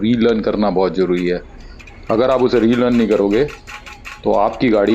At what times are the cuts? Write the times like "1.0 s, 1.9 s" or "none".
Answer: none